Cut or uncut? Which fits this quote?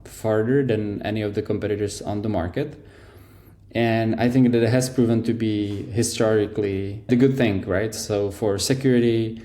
cut